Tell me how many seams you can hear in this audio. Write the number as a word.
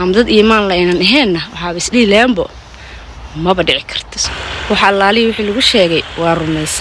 one